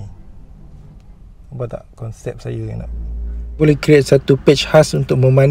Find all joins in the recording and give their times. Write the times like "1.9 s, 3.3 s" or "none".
3.5 s